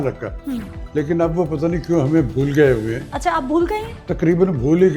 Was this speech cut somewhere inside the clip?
yes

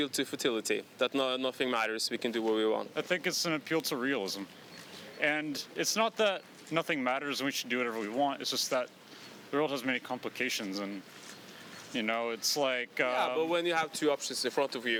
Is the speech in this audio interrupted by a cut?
no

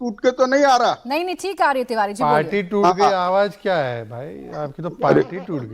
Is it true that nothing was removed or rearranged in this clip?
no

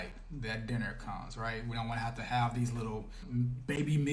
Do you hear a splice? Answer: yes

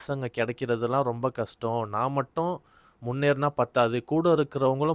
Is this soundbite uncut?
yes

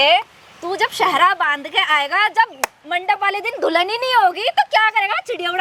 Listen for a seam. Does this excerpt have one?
no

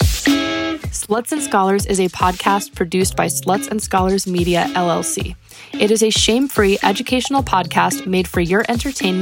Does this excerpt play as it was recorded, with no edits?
no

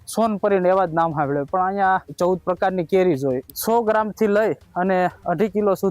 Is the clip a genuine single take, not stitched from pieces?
no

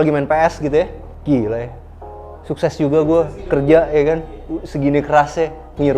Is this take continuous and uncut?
no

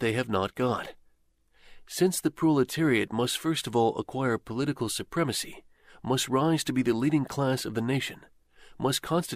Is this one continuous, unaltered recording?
yes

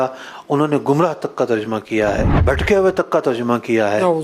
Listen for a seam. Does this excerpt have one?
yes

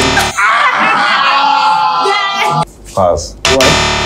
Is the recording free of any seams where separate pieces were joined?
no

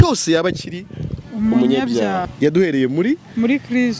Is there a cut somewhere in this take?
yes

